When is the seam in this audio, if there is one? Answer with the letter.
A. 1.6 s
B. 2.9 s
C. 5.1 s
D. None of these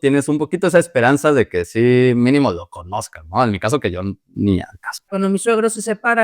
C